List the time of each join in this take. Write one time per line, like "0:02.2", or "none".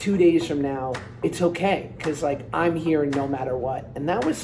0:01.0